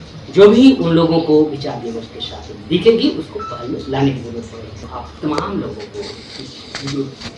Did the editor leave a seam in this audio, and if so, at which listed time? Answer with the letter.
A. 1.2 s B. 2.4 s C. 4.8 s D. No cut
C